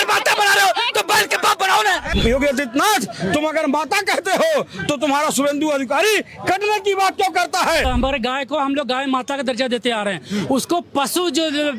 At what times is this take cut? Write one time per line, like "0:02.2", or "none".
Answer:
0:02.1
0:07.9